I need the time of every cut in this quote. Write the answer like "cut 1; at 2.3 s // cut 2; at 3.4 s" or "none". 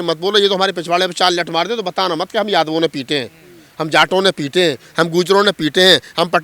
none

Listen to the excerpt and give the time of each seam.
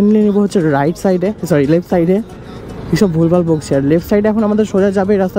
none

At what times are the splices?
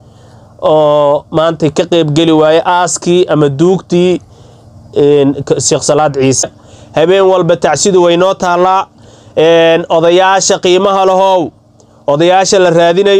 cut 1; at 6.4 s

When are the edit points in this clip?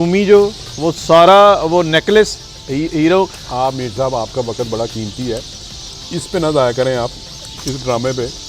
none

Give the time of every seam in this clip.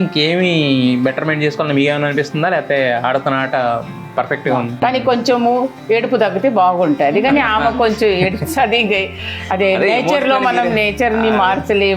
cut 1; at 4.8 s

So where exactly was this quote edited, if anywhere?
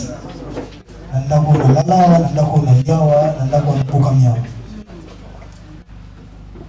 none

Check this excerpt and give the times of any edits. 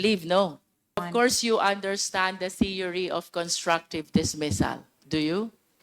cut 1; at 1.1 s

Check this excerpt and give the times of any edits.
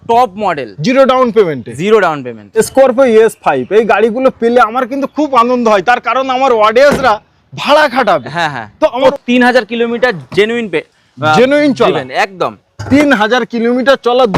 cut 1; at 2.6 s // cut 2; at 9.0 s

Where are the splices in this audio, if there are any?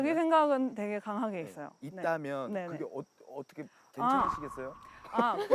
none

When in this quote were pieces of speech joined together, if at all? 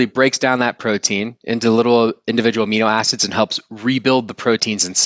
none

